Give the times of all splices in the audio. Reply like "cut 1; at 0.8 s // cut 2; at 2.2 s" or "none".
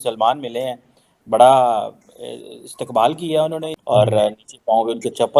cut 1; at 3.7 s